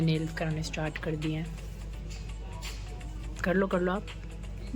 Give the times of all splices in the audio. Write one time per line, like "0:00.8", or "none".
none